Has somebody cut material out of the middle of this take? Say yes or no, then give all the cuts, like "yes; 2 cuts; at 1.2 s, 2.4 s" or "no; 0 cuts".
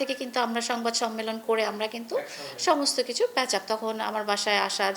no; 0 cuts